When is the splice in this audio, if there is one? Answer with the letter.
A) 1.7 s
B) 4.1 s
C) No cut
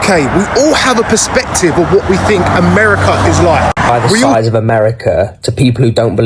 B